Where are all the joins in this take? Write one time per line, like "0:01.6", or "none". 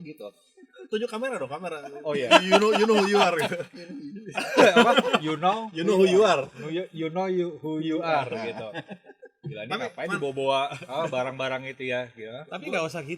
none

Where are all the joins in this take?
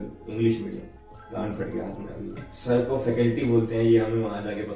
0:00.9
0:02.5

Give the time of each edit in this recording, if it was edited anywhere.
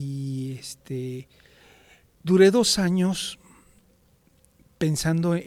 none

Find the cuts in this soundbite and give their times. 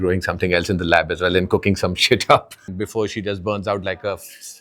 0:02.6

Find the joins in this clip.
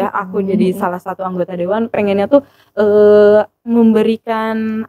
none

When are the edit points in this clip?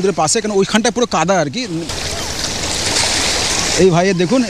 0:01.9

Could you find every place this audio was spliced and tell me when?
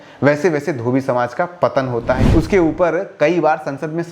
0:02.2

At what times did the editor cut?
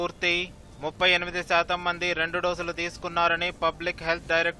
none

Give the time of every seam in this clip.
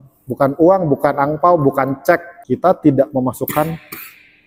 0:02.3

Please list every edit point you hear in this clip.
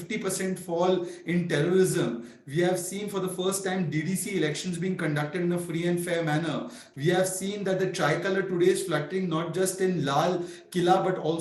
none

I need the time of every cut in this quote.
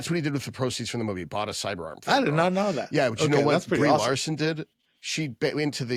none

